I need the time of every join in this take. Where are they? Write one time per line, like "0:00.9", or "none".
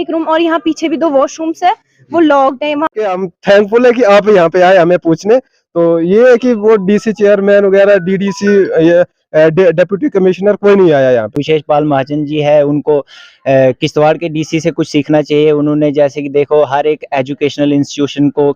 0:02.9
0:11.4